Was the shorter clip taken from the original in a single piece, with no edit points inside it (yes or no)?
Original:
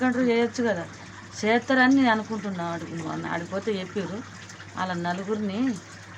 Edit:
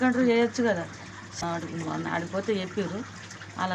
no